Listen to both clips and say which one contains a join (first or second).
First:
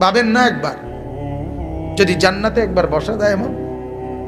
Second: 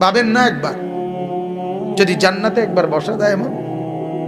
second